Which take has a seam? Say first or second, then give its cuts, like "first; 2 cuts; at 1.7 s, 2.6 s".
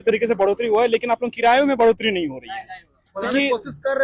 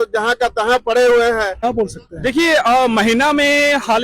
second; 1 cut; at 1.6 s